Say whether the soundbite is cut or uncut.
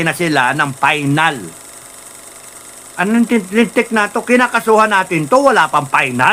uncut